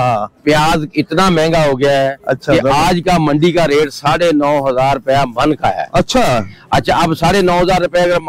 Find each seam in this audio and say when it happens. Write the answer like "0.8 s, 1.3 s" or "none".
none